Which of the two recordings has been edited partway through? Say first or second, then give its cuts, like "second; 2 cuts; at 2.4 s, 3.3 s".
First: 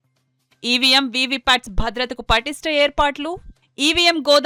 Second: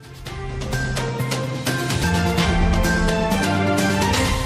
second; 1 cut; at 0.9 s